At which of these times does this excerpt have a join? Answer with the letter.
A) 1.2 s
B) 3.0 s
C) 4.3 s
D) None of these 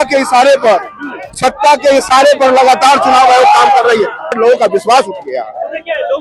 C